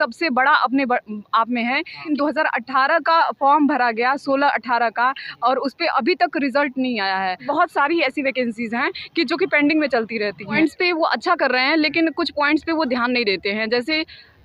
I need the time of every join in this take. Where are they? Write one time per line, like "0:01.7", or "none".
0:02.0
0:07.4
0:10.6